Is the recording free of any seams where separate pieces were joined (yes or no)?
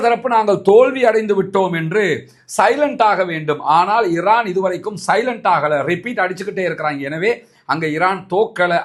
yes